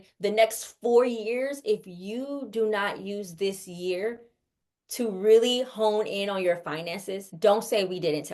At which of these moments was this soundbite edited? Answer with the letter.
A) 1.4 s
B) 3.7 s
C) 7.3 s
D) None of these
C